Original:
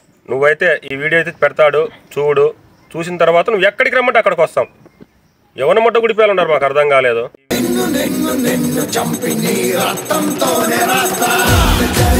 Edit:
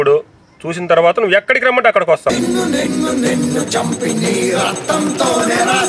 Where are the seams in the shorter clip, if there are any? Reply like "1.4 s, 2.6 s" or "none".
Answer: 2.2 s